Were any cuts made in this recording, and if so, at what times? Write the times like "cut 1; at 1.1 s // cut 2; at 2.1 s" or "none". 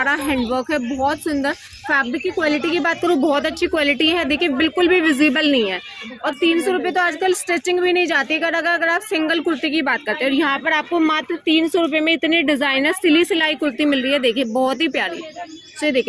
none